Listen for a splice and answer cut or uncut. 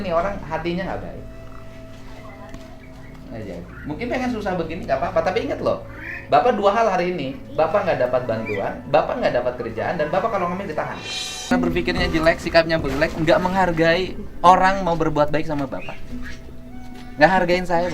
cut